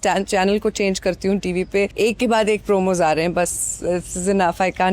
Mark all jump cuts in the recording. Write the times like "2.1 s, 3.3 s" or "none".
1.9 s